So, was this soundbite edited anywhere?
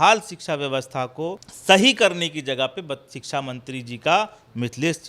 yes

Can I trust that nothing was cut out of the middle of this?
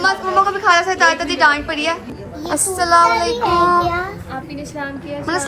no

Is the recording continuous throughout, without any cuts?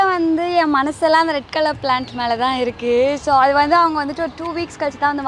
yes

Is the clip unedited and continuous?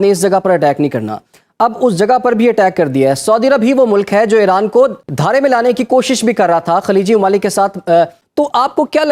no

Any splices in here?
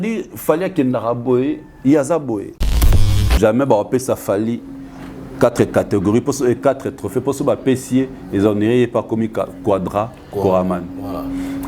yes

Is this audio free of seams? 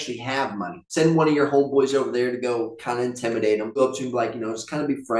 no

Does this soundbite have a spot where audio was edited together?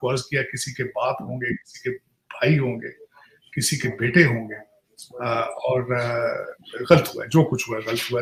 no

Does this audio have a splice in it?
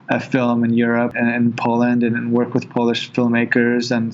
yes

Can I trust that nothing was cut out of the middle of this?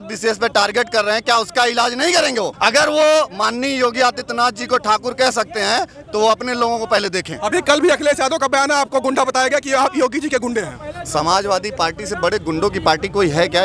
yes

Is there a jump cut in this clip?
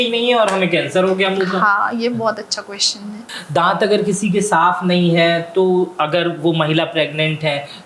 yes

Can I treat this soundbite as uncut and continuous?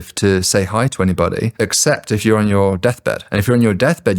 no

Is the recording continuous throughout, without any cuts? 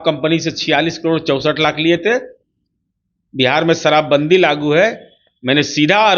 yes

